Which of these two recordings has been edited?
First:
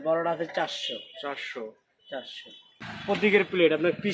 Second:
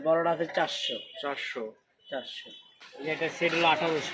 second; 1 cut; at 2.8 s

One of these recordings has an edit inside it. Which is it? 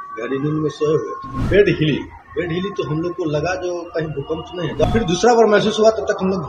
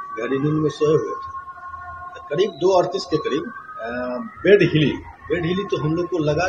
first; 2 cuts; at 1.3 s, 4.8 s

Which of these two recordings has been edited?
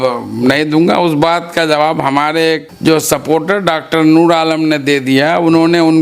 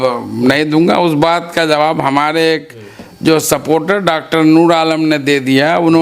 first; 1 cut; at 2.7 s

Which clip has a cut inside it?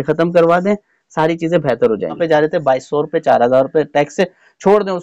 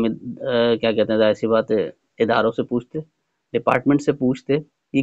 first; 1 cut; at 2.2 s

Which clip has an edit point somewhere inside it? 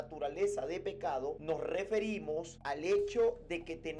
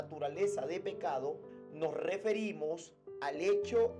first; 2 cuts; at 1.4 s, 2.5 s

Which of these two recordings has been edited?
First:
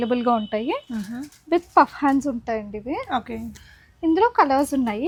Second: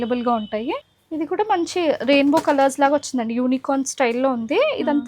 second; 1 cut; at 0.9 s

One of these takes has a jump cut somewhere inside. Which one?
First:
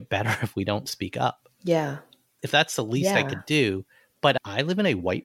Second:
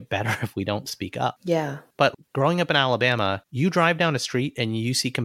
second; 2 cuts; at 1.5 s, 3.4 s

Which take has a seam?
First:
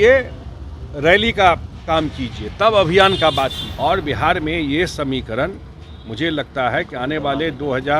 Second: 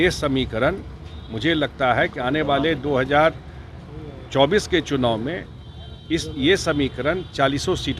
first; 1 cut; at 3.6 s

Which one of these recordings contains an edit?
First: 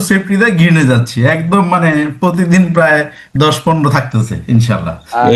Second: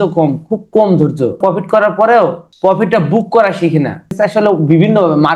second; 3 cuts; at 1.4 s, 2.4 s, 4.1 s

